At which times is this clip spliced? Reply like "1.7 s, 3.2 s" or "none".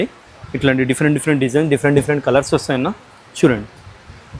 none